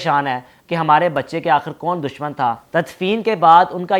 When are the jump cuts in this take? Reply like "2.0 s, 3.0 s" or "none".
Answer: 2.6 s